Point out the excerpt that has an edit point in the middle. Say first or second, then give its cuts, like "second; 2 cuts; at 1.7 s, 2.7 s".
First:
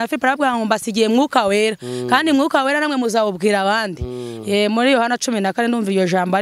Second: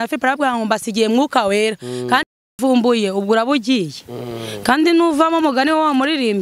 second; 1 cut; at 2.2 s